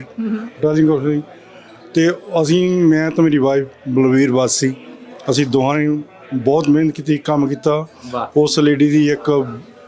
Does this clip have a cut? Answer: no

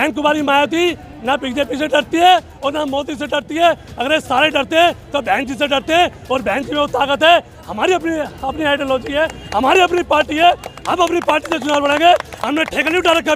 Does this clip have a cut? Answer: no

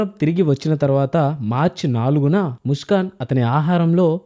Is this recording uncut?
yes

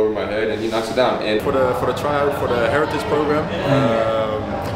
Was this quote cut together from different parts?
yes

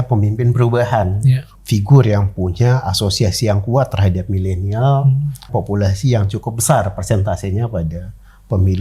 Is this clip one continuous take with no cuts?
no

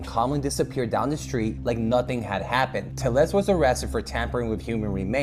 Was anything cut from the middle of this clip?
no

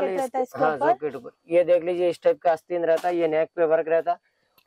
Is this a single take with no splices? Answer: yes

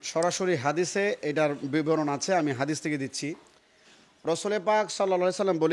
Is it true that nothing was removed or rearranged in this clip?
yes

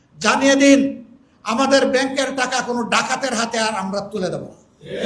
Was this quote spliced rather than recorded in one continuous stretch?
no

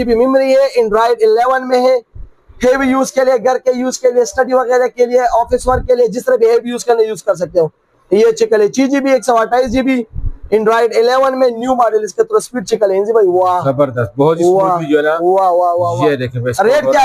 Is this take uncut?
yes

